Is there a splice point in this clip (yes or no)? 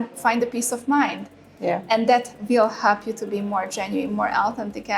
no